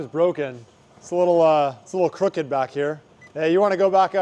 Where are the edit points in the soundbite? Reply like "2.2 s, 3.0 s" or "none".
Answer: 3.0 s

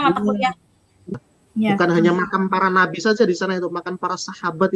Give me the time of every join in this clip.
1.1 s

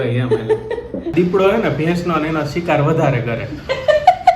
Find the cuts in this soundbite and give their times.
1.1 s

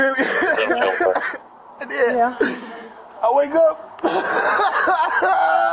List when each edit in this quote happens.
none

